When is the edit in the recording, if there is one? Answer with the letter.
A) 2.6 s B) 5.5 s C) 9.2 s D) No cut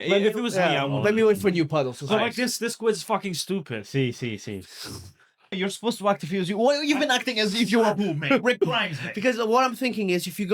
B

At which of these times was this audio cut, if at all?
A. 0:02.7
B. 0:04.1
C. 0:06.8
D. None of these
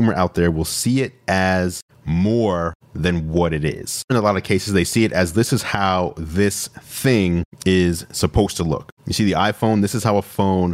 B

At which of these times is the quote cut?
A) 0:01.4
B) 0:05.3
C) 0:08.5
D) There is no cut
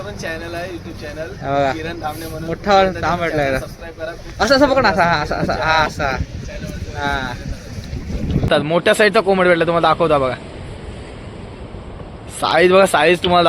C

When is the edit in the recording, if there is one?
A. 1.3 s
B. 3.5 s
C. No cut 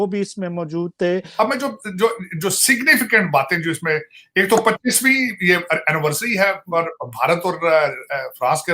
A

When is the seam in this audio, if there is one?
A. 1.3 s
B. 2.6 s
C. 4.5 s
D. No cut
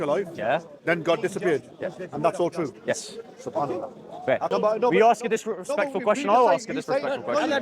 C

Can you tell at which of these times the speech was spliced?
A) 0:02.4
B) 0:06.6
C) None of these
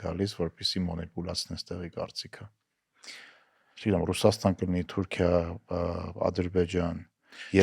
C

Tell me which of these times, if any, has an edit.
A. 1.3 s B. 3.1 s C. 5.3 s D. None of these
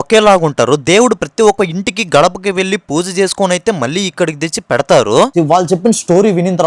C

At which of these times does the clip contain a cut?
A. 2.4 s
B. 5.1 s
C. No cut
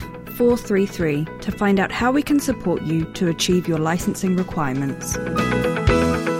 B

